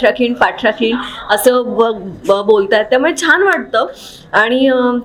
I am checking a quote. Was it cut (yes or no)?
no